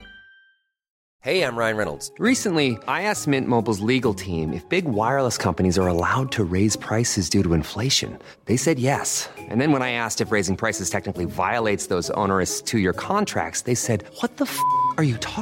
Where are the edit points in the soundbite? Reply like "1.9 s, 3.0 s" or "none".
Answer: 1.0 s

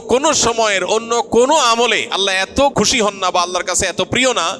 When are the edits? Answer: 2.7 s

